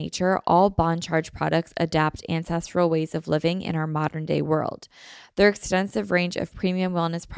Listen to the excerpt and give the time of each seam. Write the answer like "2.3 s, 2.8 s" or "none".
none